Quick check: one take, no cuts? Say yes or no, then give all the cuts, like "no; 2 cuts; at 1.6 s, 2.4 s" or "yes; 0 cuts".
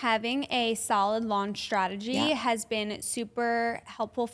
yes; 0 cuts